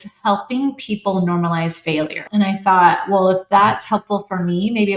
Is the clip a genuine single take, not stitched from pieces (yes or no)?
no